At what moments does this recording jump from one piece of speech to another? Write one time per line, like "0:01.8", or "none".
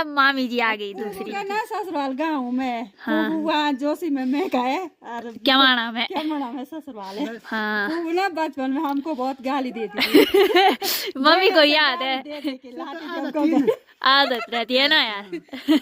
none